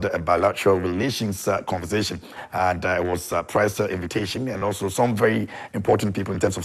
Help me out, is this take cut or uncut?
uncut